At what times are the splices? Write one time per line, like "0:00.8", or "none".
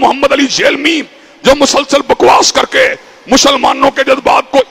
none